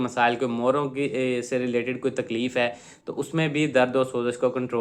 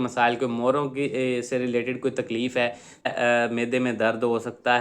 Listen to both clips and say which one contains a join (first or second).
second